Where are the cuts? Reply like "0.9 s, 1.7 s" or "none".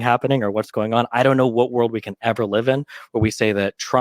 1.0 s